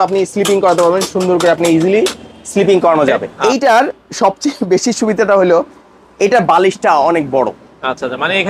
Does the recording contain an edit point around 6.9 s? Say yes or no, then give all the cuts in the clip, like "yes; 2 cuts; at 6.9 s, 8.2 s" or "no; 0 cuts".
no; 1 cut; at 3.3 s